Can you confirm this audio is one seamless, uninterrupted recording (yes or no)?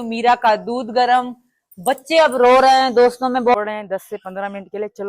no